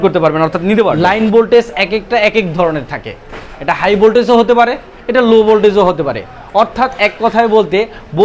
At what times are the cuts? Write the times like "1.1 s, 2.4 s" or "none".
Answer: 1.0 s

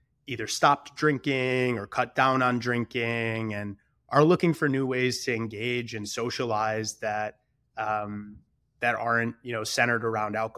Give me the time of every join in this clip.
none

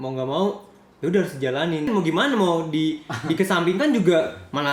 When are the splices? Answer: 1.9 s

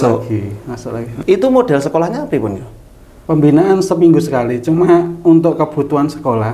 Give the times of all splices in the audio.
1.2 s

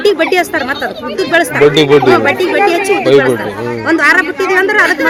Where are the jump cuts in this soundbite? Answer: none

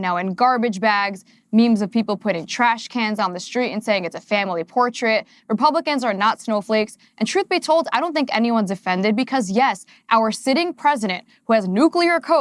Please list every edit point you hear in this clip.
none

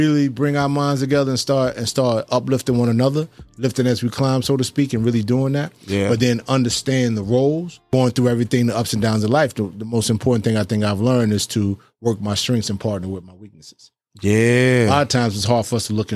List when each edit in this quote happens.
7.8 s

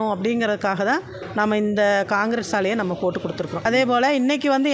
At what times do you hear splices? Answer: 3.6 s

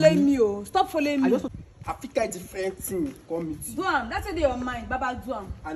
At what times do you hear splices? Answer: 1.4 s

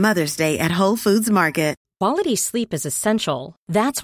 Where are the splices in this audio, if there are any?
1.8 s

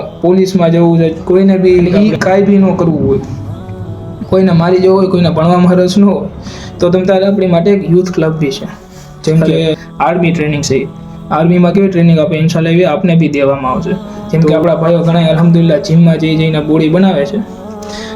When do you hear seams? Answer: 1.9 s, 9.8 s, 14.2 s

